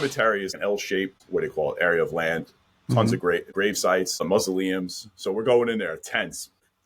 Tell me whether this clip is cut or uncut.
uncut